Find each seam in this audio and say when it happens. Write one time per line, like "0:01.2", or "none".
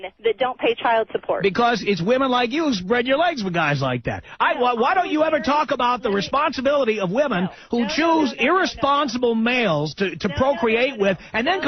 none